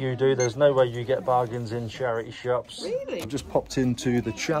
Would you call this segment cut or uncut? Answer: cut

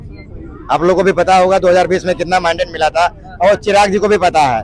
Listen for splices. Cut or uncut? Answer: uncut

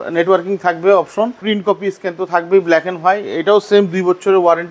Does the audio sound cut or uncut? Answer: cut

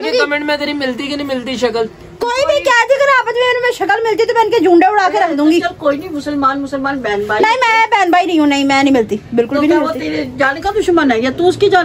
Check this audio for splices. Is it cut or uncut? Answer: uncut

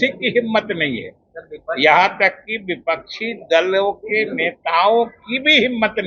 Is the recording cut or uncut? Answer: uncut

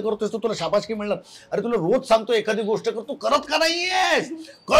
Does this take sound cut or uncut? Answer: uncut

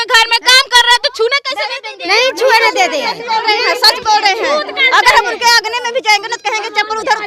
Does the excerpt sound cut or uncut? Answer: uncut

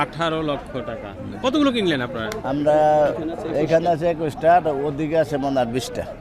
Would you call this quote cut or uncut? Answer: cut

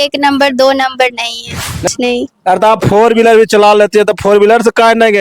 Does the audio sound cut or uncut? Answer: cut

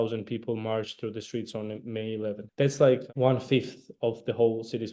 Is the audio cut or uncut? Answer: cut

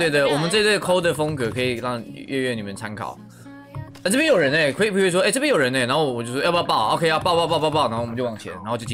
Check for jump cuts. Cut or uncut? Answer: uncut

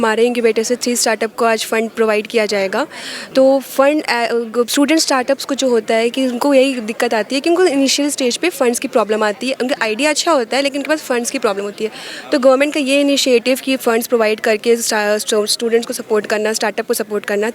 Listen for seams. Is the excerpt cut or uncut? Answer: uncut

